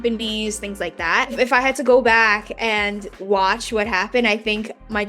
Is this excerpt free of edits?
no; 2 cuts; at 1.3 s, 3.2 s

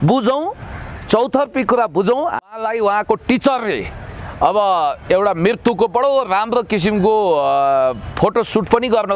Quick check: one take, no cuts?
no; 1 cut; at 2.5 s

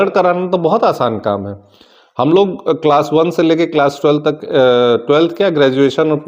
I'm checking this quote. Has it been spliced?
no; 0 cuts

